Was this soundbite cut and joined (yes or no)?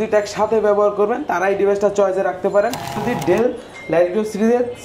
yes